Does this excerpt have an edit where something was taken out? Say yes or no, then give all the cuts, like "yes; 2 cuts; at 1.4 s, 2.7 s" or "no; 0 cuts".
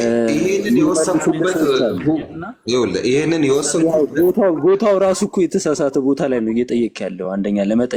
no; 0 cuts